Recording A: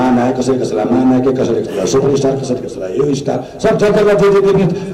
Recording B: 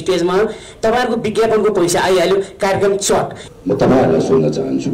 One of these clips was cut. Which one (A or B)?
B